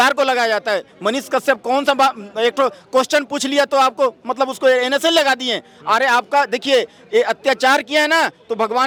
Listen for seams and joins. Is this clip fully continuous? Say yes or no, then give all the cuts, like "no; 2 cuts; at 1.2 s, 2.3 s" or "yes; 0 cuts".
yes; 0 cuts